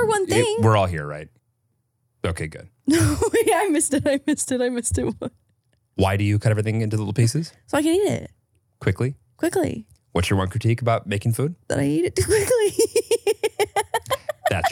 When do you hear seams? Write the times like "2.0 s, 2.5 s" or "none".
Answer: 1.3 s